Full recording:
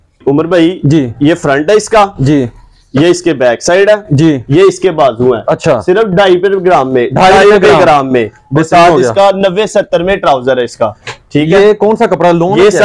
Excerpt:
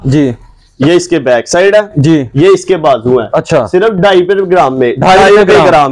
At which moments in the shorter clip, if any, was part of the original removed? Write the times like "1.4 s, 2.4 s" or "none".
none